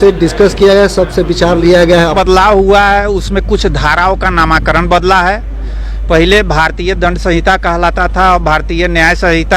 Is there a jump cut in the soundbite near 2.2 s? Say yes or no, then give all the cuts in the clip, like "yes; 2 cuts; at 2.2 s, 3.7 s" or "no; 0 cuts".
yes; 1 cut; at 2.2 s